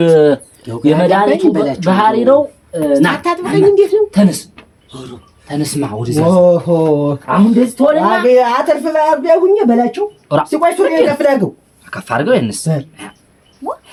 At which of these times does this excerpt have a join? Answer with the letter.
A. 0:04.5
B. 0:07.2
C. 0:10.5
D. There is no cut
D